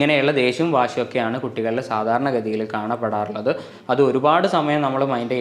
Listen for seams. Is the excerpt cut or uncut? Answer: cut